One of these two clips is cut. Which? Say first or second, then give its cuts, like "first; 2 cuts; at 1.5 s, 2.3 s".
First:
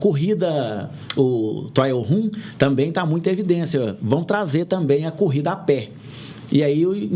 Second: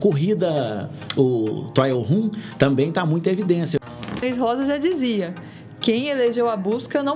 second; 1 cut; at 4.1 s